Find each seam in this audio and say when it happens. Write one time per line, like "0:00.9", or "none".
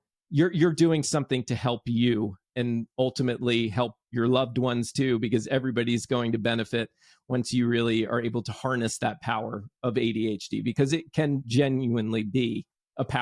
0:02.5
0:11.4